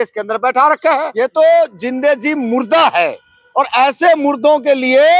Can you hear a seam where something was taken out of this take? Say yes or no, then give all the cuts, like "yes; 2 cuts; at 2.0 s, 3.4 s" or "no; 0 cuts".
yes; 1 cut; at 1.1 s